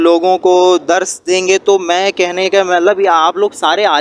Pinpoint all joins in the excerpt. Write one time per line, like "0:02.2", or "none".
none